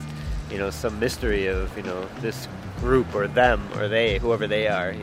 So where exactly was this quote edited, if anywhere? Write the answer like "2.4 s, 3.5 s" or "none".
none